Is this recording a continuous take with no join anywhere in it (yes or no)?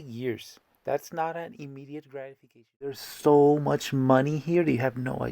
no